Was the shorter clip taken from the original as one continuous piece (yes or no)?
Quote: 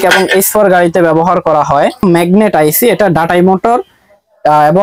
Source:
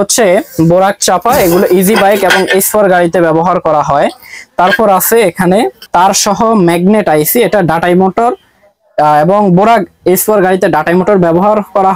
no